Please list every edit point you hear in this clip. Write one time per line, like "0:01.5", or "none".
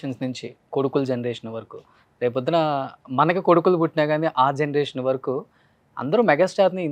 none